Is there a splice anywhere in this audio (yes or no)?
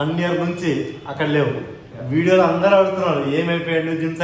no